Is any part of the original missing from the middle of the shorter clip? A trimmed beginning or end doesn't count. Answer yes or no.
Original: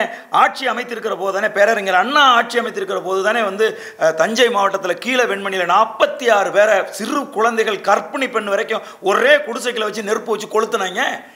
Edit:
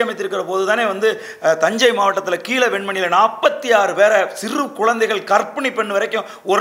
no